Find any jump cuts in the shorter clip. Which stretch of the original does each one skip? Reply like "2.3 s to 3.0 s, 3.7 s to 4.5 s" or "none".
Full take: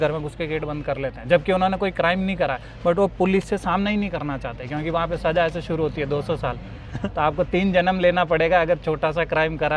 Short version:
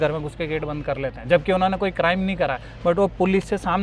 none

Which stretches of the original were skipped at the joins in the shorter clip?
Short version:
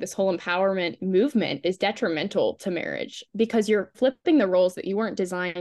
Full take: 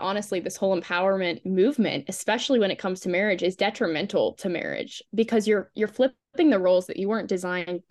2.0 s to 3.4 s, 5.8 s to 6.1 s

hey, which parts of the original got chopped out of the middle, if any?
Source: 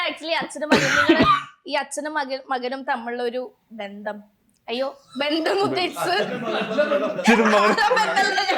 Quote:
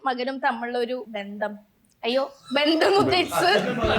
3.6 s to 3.8 s

